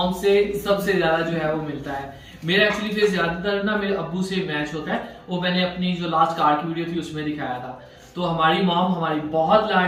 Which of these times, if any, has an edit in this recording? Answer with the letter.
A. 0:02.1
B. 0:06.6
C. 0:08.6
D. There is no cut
D